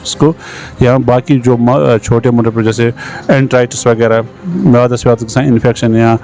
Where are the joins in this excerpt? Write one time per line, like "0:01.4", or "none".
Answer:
none